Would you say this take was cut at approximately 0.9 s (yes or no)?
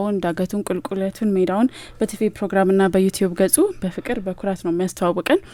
no